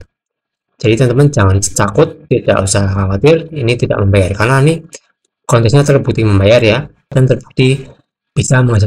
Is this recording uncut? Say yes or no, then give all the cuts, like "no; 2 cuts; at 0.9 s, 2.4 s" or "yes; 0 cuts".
no; 1 cut; at 7.1 s